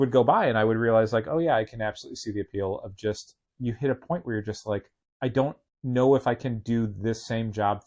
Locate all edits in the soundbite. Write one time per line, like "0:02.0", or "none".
0:05.0
0:05.7